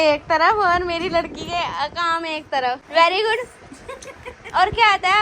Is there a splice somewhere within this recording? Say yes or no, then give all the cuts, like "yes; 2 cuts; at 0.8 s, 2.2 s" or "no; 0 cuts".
yes; 1 cut; at 2.8 s